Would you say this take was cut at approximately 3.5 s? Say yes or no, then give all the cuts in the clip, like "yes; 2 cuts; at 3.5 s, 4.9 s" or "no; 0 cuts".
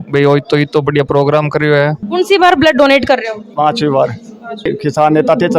no; 2 cuts; at 2.0 s, 4.7 s